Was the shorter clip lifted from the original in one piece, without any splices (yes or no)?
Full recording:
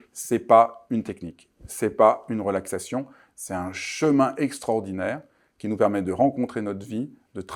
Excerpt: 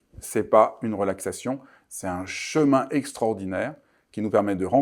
yes